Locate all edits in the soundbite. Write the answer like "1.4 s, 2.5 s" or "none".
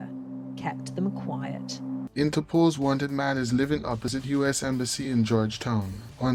2.1 s